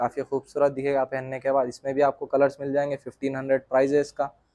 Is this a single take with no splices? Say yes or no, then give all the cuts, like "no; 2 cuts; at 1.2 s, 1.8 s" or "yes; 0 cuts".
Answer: yes; 0 cuts